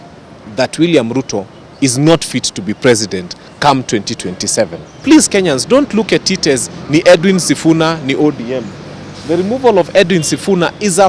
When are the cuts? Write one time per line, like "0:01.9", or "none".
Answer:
0:05.0